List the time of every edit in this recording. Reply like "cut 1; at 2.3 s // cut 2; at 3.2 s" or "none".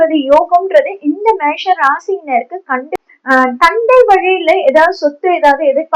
cut 1; at 3.0 s